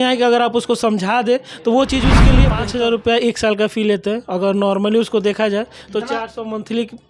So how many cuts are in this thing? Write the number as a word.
one